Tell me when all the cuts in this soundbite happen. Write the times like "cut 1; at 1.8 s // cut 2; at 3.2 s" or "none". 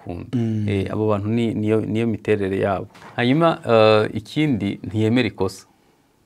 cut 1; at 2.9 s